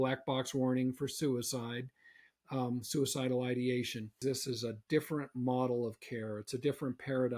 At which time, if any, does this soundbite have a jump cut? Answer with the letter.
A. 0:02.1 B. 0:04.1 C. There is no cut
B